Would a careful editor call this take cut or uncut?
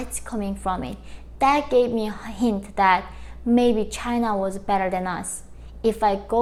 uncut